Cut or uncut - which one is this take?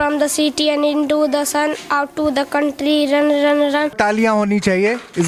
cut